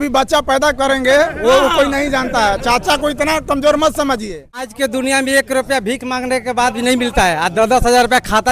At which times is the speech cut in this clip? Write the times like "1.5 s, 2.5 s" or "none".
4.7 s